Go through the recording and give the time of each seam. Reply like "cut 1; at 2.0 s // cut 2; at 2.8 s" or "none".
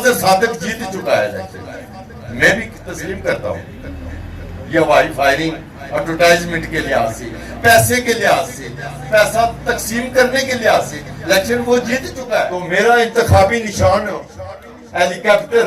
cut 1; at 12.5 s